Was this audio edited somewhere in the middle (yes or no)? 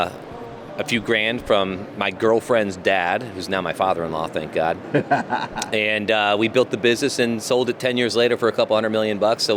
no